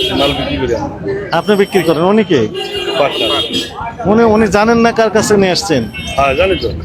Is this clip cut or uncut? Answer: uncut